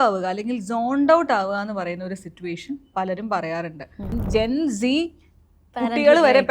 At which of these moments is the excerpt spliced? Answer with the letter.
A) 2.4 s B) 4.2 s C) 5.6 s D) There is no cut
B